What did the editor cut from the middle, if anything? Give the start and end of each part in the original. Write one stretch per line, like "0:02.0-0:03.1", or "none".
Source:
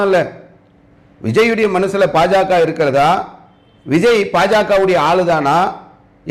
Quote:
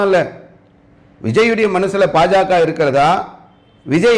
none